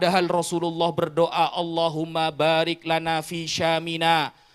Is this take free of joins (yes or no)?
yes